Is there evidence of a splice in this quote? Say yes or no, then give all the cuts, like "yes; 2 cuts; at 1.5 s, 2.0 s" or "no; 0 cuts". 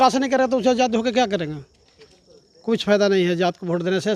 no; 0 cuts